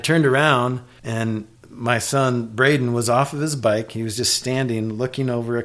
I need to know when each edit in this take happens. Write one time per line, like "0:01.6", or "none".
0:01.4